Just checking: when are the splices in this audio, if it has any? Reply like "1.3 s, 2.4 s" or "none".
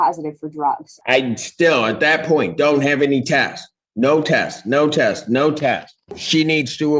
0.9 s, 6.0 s